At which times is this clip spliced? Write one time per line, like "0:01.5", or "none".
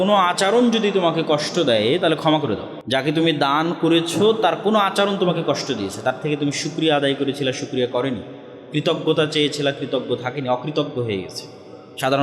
0:02.7